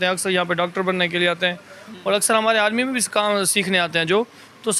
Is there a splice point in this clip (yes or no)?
no